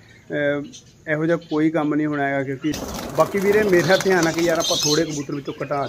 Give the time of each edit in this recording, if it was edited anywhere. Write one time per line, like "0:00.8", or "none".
0:02.8